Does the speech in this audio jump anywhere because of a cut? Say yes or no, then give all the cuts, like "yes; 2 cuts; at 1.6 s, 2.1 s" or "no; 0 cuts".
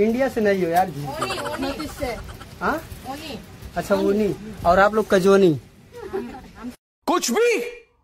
no; 0 cuts